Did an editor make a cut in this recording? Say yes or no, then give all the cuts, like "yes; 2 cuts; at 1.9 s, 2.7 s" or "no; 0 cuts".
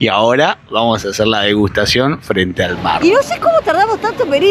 yes; 1 cut; at 3.0 s